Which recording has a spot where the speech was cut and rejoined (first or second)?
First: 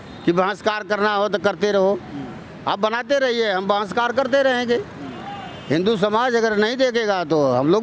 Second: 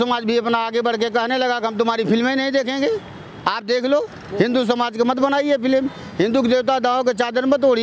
second